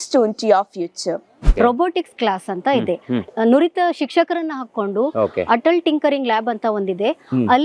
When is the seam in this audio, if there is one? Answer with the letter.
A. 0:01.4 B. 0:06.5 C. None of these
A